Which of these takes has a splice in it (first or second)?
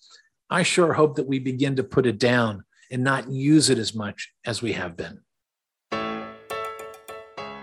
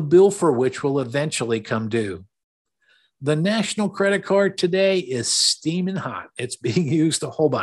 first